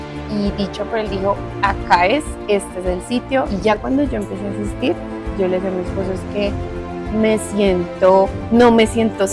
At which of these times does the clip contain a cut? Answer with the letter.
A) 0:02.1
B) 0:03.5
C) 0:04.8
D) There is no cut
B